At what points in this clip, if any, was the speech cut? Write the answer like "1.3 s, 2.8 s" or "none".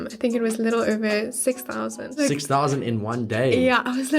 2.2 s

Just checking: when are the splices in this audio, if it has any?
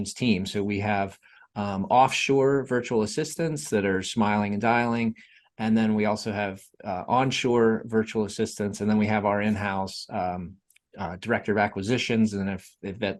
none

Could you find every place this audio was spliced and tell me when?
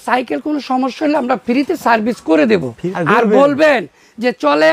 2.8 s

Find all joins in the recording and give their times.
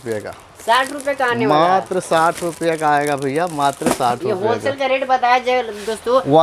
none

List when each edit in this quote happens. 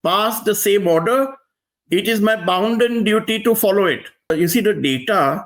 4.3 s

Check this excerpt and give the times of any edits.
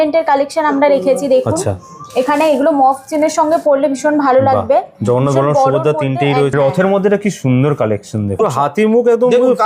6.5 s, 8.4 s

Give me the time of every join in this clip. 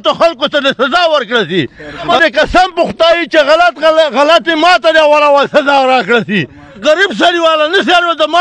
2.1 s, 6.8 s

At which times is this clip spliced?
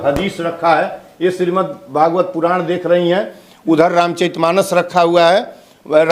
none

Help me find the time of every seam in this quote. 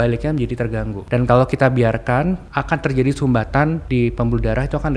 1.0 s, 2.5 s, 3.8 s

